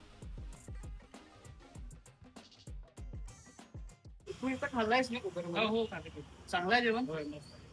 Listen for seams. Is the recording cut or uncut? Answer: cut